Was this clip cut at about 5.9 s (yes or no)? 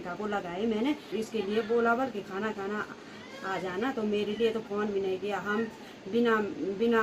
no